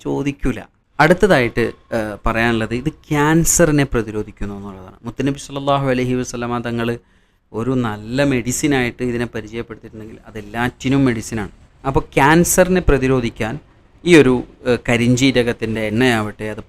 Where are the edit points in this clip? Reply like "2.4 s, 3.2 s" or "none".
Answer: none